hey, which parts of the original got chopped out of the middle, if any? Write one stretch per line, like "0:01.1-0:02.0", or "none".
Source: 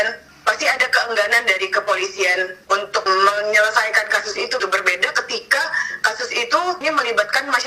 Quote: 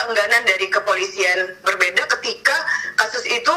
0:02.6-0:04.7